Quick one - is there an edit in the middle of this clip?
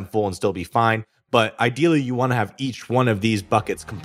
no; 0 cuts

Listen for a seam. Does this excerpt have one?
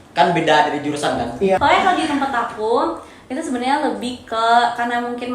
yes; 1 cut; at 1.6 s

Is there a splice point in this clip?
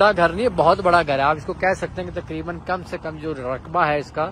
no; 0 cuts

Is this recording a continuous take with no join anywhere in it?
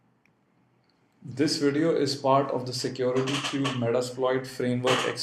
no; 1 cut; at 3.4 s

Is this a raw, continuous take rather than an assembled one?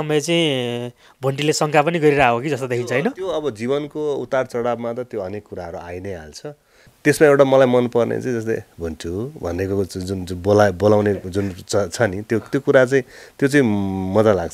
no; 1 cut; at 6.9 s

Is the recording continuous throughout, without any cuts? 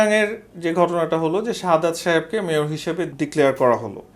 no; 1 cut; at 3.1 s

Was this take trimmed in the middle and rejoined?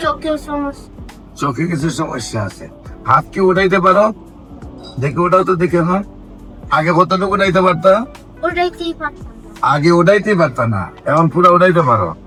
no; 0 cuts

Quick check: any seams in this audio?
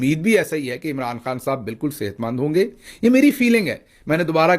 yes; 1 cut; at 2.8 s

